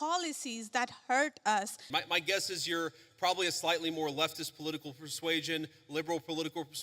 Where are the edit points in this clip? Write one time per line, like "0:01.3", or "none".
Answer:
0:01.8